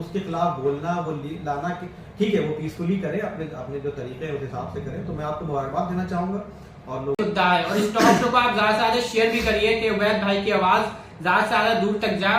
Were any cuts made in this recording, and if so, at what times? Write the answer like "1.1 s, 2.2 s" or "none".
7.2 s

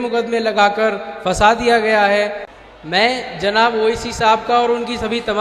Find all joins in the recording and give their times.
2.5 s

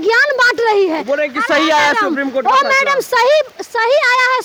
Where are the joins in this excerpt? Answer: none

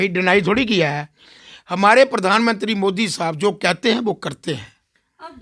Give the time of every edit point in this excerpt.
none

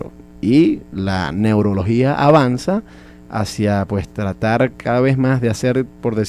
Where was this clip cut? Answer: none

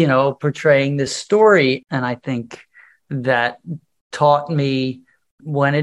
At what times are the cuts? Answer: 1.2 s, 1.8 s

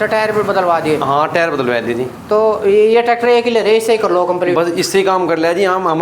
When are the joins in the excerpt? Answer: none

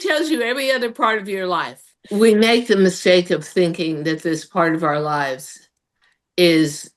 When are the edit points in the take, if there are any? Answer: 1.9 s

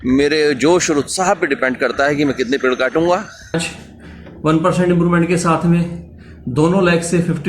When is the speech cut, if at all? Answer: 3.7 s

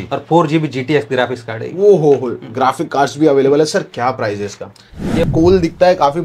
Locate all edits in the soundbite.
5.3 s

